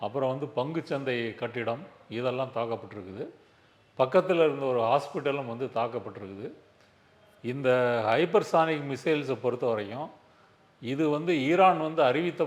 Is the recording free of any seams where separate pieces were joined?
yes; 0 cuts

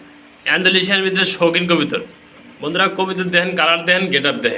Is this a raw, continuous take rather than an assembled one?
yes; 0 cuts

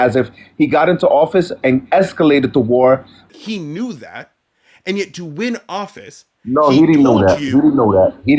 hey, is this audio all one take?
no; 1 cut; at 3.2 s

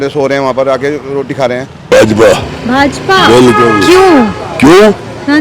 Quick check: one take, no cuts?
no; 1 cut; at 1.7 s

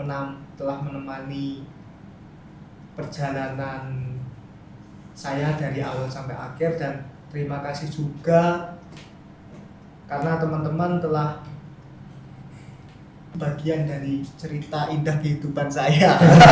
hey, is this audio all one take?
no; 1 cut; at 13.4 s

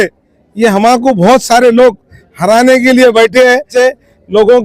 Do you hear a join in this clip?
yes; 1 cut; at 3.7 s

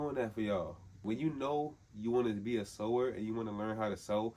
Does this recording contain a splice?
yes; 1 cut; at 1.0 s

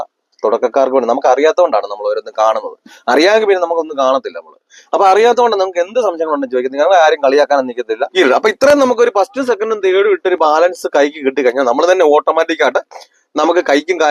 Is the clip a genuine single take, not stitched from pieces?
no; 1 cut; at 8.0 s

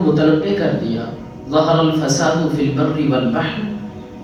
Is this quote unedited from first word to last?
yes; 0 cuts

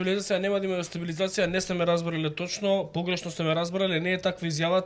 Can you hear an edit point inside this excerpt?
no; 0 cuts

